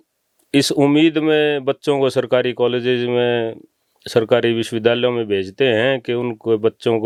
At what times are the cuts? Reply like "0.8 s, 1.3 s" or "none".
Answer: none

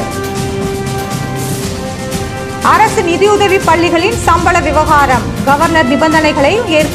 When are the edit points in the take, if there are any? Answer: none

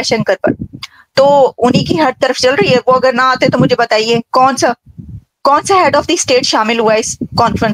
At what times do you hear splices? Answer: none

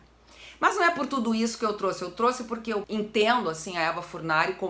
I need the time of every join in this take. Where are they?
2.9 s

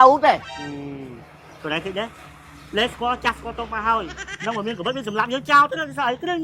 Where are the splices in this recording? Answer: 4.2 s

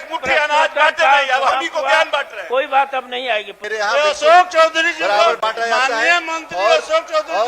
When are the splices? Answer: 3.6 s

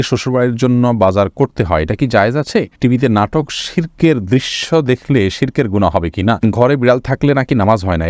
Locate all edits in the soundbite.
2.8 s, 6.4 s

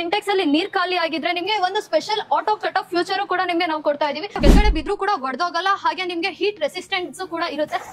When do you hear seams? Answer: 4.4 s

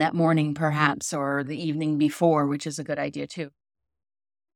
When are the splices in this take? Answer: none

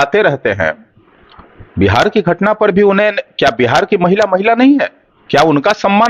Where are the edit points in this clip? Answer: none

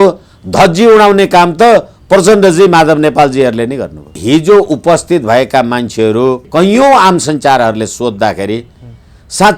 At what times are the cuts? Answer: 4.2 s, 6.5 s

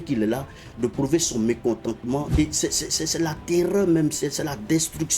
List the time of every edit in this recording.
2.3 s

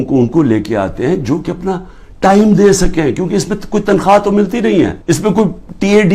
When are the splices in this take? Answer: 5.0 s

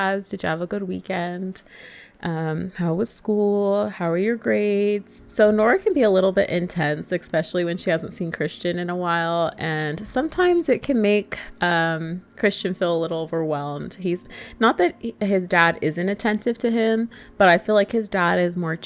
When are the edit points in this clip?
none

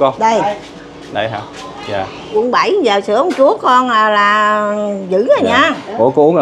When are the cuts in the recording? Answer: 2.4 s

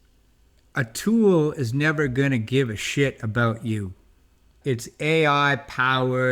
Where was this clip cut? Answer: 4.5 s

